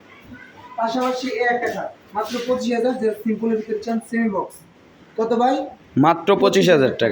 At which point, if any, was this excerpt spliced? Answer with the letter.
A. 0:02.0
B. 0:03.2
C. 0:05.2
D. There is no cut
D